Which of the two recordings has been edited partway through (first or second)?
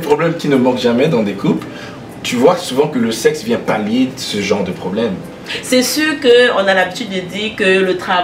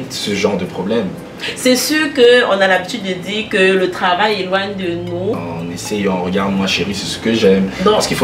second